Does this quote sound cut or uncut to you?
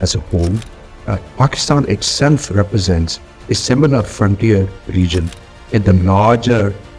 uncut